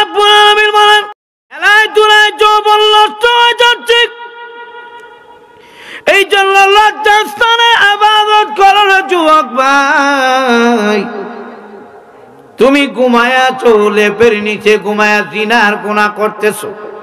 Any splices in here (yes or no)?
yes